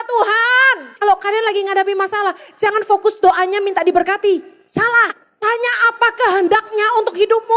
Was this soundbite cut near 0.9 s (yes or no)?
yes